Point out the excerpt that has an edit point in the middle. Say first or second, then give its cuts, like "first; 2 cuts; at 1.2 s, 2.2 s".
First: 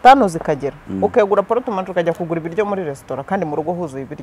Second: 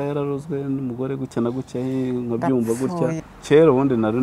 second; 1 cut; at 3.3 s